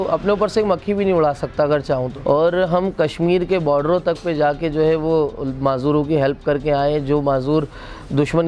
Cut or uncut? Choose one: cut